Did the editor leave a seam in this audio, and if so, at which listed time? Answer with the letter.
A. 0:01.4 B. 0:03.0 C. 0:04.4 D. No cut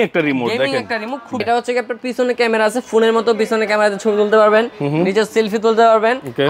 A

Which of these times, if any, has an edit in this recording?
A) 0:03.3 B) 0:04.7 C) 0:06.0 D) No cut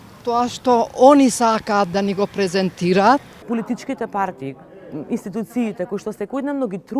A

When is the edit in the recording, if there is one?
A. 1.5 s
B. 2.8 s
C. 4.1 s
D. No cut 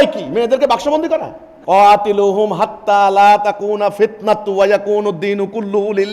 D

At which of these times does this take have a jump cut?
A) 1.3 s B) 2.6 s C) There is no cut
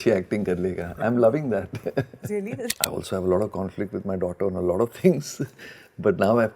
B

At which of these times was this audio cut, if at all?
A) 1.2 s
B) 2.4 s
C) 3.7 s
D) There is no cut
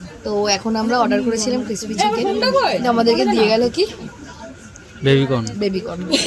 D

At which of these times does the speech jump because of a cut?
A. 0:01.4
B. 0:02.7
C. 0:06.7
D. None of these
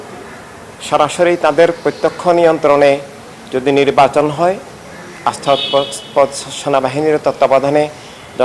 D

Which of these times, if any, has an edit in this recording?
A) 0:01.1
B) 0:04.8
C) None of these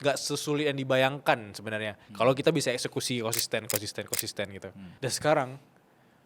B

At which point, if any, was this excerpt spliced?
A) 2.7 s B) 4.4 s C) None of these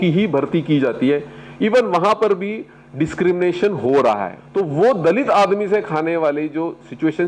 B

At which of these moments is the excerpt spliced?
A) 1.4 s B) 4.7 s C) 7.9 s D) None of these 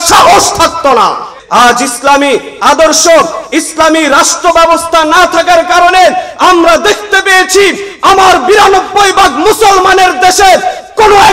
A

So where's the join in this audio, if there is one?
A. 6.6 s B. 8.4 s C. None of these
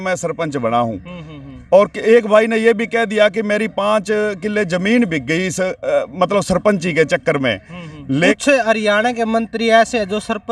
B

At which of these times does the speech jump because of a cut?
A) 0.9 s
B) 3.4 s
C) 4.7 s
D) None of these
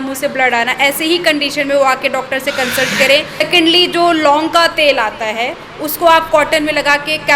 B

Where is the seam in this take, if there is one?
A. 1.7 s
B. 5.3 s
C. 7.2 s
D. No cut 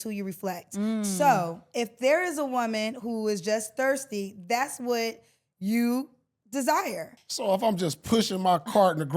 C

